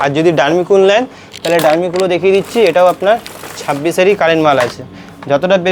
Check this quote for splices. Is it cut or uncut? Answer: uncut